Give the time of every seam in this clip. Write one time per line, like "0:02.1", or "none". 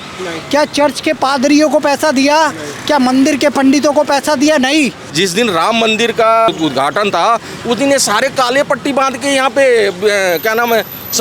0:05.0
0:06.5